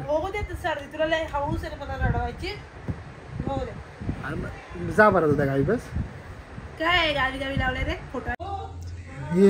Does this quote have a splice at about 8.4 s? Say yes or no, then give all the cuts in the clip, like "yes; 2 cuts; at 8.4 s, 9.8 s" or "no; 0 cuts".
yes; 1 cut; at 8.4 s